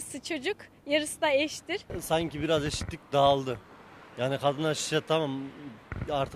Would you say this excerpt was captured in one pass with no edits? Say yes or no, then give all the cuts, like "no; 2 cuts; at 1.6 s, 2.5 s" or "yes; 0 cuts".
no; 1 cut; at 2.0 s